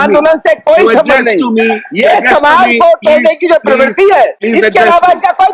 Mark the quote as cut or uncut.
cut